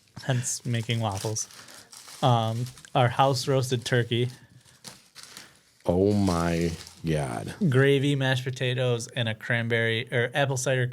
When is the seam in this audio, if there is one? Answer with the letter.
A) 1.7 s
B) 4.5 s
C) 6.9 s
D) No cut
D